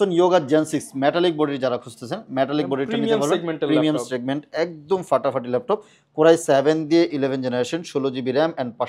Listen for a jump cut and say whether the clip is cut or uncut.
uncut